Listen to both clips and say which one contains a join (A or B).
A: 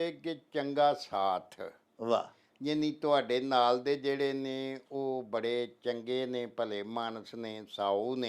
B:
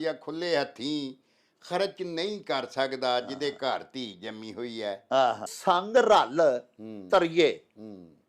B